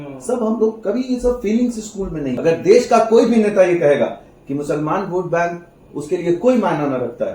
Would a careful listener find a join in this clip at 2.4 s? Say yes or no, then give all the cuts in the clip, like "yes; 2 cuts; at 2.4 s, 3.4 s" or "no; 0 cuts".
yes; 1 cut; at 2.4 s